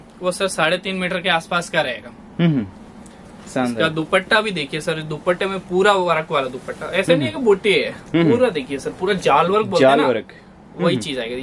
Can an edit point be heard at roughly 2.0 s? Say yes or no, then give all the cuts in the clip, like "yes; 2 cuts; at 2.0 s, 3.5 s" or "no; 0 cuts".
no; 0 cuts